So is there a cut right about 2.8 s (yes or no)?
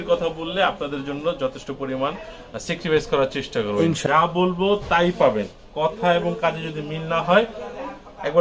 no